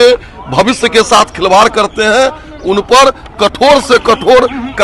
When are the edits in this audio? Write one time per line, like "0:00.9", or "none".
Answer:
none